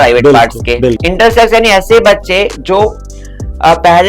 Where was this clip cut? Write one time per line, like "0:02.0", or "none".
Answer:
0:01.0